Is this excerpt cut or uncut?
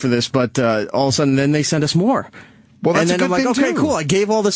cut